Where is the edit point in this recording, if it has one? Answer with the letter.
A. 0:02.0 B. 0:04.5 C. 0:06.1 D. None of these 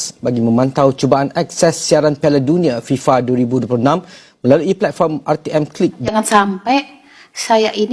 C